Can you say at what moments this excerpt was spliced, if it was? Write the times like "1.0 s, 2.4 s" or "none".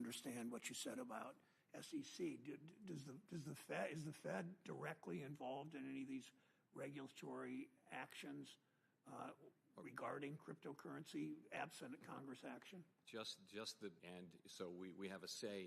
14.0 s